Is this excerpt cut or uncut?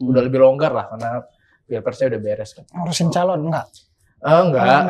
uncut